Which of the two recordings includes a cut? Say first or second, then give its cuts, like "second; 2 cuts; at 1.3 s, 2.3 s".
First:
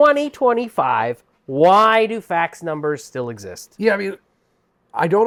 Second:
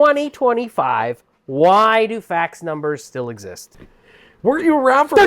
second; 1 cut; at 3.7 s